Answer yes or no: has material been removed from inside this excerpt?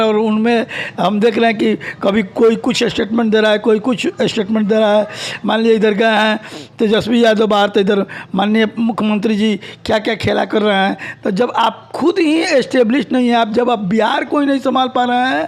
no